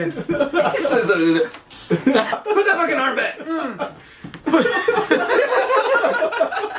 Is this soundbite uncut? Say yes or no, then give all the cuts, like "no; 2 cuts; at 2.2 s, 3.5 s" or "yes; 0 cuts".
no; 1 cut; at 2.3 s